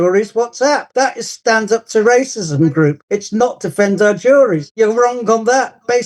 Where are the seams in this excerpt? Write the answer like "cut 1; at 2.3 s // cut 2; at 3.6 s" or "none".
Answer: cut 1; at 1.2 s // cut 2; at 3.0 s // cut 3; at 4.7 s